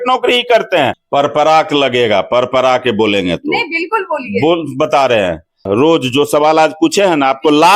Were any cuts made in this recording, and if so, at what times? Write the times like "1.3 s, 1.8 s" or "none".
1.0 s, 5.7 s

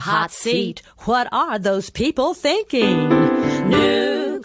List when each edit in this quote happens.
none

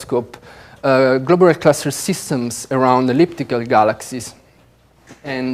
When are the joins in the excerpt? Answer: none

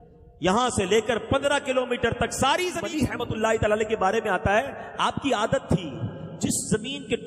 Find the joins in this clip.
2.9 s

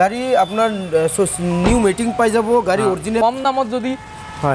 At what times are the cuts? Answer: 3.2 s

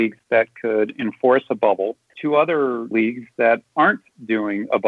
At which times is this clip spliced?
2.0 s

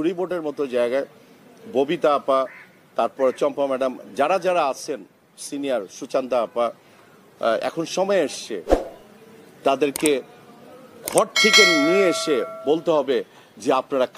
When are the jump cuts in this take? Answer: none

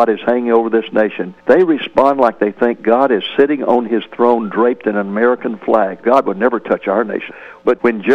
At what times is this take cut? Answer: 1.3 s, 6.0 s, 7.2 s

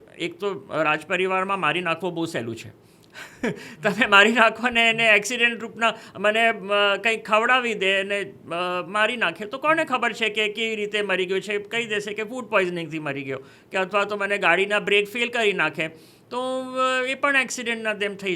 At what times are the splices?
none

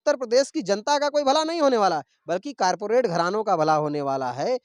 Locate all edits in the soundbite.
none

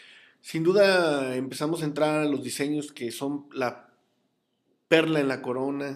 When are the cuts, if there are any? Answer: 3.9 s

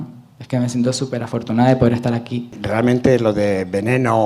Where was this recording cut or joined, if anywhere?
2.6 s

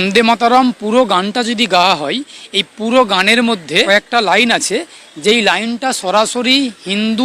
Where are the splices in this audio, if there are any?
3.9 s

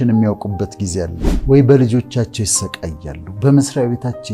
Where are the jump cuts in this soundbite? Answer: 1.2 s

